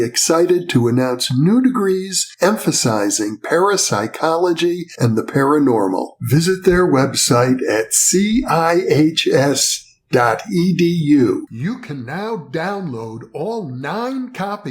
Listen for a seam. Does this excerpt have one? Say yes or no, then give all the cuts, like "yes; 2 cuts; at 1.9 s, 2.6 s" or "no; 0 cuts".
no; 0 cuts